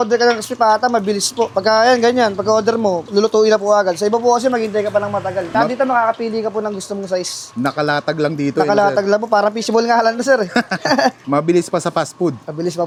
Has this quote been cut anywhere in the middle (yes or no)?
no